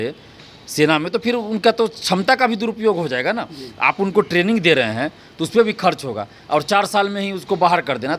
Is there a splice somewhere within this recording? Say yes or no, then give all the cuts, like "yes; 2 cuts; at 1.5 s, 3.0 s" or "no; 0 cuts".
no; 0 cuts